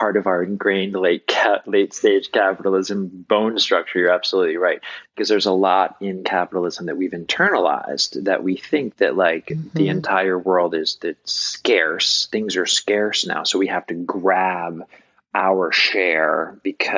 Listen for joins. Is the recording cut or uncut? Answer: uncut